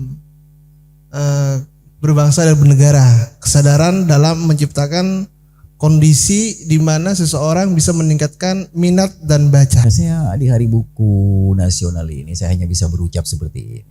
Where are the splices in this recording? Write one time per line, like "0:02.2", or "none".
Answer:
0:09.8